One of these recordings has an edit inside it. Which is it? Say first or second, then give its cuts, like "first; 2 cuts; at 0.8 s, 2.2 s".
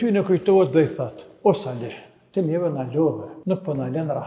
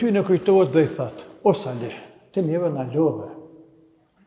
first; 1 cut; at 3.3 s